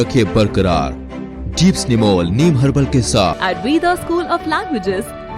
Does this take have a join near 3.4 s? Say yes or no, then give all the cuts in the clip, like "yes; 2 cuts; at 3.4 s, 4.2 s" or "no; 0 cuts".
yes; 1 cut; at 3.4 s